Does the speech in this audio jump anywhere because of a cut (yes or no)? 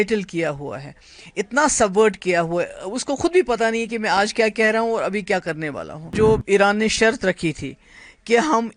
yes